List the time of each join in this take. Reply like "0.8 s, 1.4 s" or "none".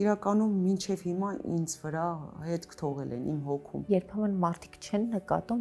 3.9 s